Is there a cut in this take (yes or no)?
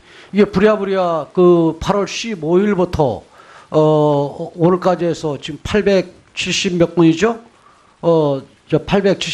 no